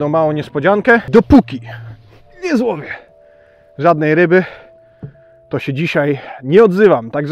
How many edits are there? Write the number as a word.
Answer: one